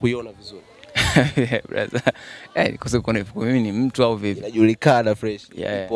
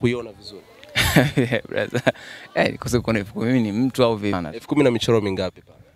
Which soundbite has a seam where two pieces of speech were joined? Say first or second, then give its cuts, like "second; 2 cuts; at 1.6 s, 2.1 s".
second; 1 cut; at 4.4 s